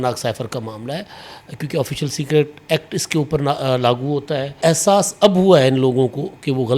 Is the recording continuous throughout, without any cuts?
no; 1 cut; at 4.6 s

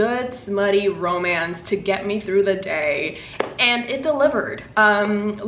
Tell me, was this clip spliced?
no; 0 cuts

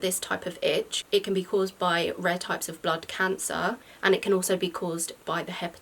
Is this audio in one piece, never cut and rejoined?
no; 1 cut; at 1.0 s

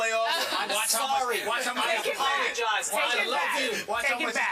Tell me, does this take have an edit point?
yes; 1 cut; at 2.7 s

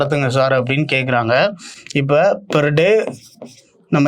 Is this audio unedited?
yes; 0 cuts

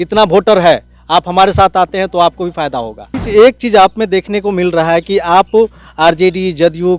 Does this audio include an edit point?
yes; 1 cut; at 3.1 s

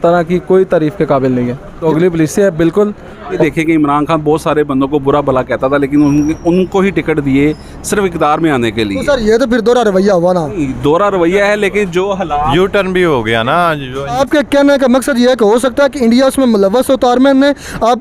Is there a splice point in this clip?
yes; 3 cuts; at 1.7 s, 3.4 s, 14.1 s

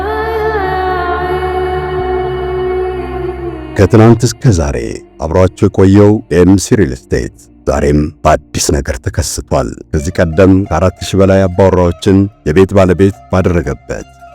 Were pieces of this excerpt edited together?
yes; 1 cut; at 3.6 s

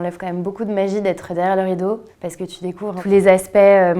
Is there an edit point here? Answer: yes; 1 cut; at 3.0 s

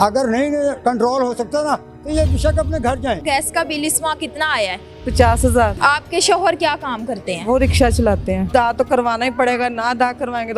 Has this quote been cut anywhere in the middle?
yes; 3 cuts; at 3.2 s, 5.8 s, 8.5 s

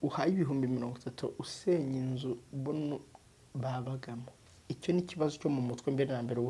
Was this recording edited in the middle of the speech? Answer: no; 0 cuts

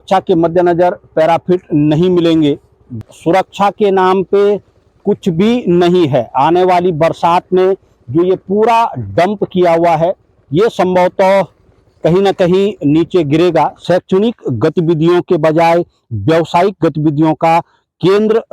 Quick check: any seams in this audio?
yes; 2 cuts; at 3.1 s, 13.8 s

